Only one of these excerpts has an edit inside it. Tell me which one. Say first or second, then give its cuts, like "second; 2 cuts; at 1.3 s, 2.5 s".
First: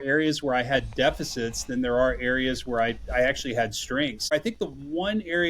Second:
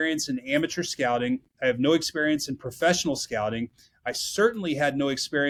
first; 1 cut; at 4.6 s